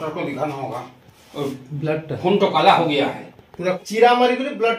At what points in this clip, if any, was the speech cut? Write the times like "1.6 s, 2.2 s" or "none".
3.8 s